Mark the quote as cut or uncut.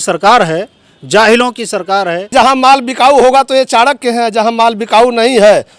cut